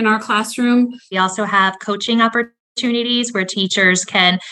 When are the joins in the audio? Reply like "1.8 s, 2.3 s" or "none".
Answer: 1.1 s